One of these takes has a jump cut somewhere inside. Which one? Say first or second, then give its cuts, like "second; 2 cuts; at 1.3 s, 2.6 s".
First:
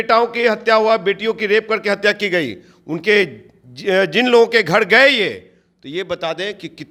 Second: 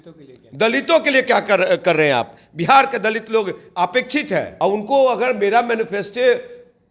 second; 1 cut; at 4.5 s